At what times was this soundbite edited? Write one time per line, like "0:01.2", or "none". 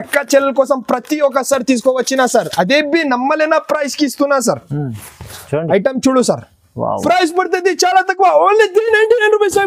0:07.0